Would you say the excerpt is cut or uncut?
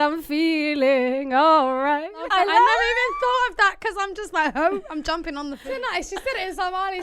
cut